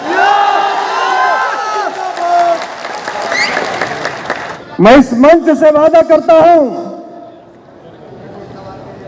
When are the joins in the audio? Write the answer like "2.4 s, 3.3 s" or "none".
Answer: 4.6 s